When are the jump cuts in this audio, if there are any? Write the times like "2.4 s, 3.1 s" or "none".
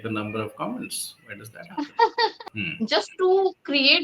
2.4 s